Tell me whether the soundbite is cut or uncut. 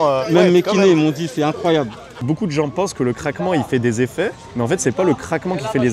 cut